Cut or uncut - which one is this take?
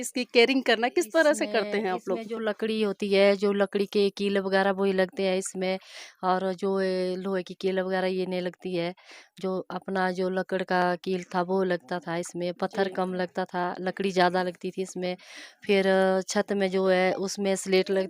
uncut